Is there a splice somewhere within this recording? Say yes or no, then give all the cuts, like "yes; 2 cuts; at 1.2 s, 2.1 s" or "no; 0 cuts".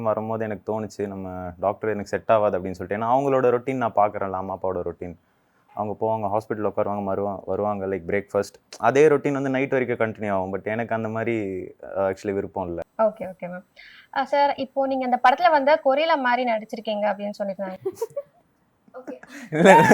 yes; 1 cut; at 12.9 s